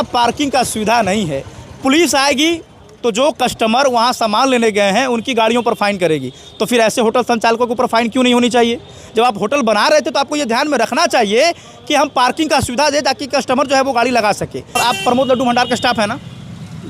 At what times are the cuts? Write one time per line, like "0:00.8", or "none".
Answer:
0:14.7